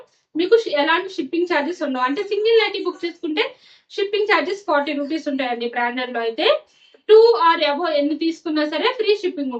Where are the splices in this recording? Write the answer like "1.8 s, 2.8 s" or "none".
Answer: none